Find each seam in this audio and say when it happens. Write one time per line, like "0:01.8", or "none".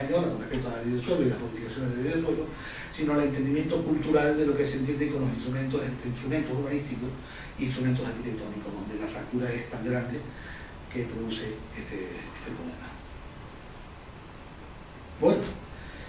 0:09.3